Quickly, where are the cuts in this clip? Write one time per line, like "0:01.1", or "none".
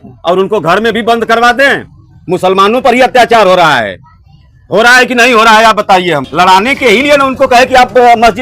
0:06.3